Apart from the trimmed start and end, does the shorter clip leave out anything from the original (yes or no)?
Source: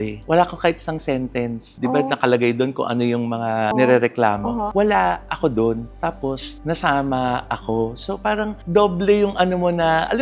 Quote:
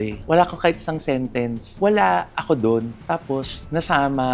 yes